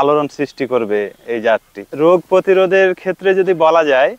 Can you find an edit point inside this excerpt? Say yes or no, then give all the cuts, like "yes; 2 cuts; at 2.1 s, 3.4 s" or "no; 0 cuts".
no; 0 cuts